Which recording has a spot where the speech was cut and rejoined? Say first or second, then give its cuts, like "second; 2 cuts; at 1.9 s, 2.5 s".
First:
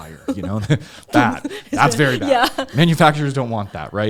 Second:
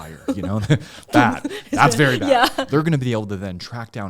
second; 1 cut; at 2.6 s